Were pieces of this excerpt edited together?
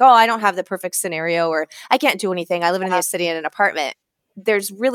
no; 0 cuts

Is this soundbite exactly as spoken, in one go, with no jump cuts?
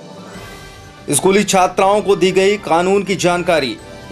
no; 1 cut; at 1.0 s

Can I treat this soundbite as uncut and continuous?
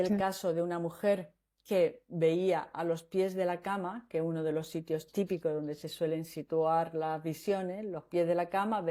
yes; 0 cuts

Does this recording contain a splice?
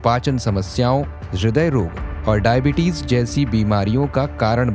yes; 2 cuts; at 1.2 s, 2.0 s

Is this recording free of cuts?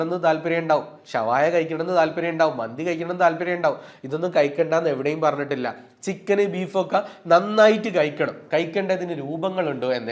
yes; 0 cuts

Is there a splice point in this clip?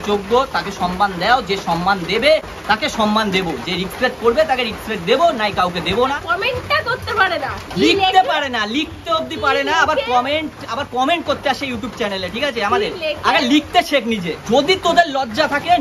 yes; 3 cuts; at 2.5 s, 6.2 s, 14.3 s

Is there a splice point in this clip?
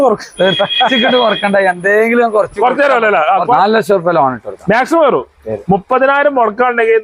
yes; 1 cut; at 3.5 s

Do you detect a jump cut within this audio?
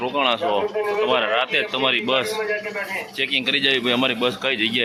no; 0 cuts

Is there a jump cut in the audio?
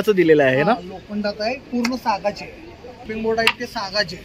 yes; 1 cut; at 3.1 s

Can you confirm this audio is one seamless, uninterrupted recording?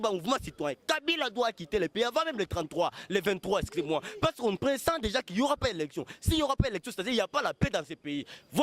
yes; 0 cuts

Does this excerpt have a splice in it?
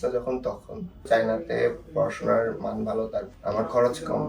yes; 2 cuts; at 1.0 s, 3.3 s

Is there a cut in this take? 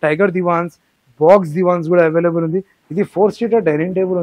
yes; 1 cut; at 2.8 s

